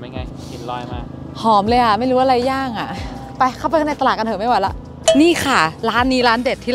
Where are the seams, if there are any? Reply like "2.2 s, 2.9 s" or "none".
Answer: 4.9 s